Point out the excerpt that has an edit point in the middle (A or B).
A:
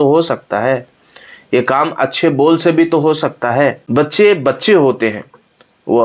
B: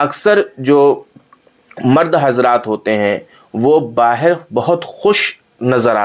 A